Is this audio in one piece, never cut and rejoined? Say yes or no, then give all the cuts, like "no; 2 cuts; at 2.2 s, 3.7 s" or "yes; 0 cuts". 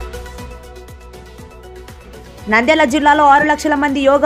yes; 0 cuts